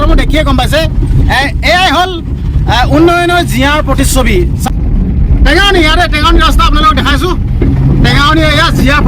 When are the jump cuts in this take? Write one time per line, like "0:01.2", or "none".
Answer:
0:04.7